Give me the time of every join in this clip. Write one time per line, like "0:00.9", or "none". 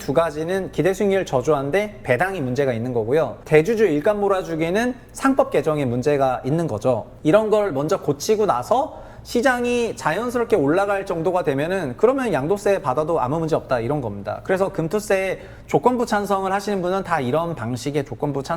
0:03.4
0:07.1